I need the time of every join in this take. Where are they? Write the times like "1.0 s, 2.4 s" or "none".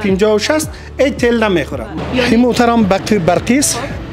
2.0 s